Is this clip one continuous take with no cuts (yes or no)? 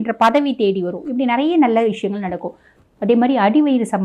no